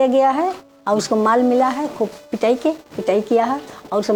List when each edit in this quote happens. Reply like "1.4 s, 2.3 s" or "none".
none